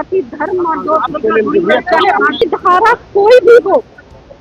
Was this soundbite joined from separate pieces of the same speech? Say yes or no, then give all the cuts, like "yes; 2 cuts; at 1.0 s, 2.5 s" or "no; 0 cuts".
yes; 1 cut; at 2.4 s